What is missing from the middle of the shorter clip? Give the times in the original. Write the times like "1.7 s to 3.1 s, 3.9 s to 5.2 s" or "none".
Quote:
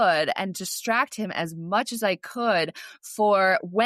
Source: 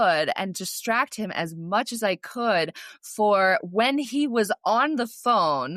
none